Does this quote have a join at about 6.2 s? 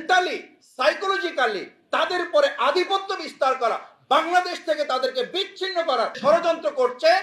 yes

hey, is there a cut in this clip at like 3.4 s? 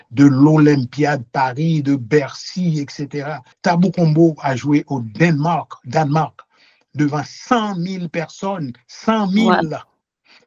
yes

